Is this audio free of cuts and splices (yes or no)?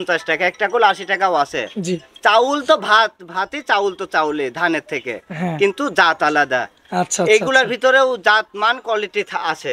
yes